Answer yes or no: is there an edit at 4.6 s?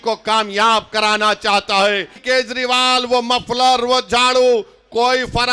no